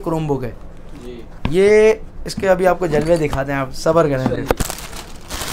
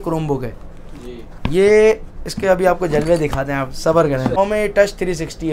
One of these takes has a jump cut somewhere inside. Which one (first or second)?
second